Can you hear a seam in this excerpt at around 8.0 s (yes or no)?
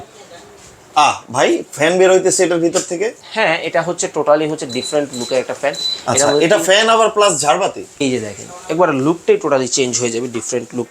yes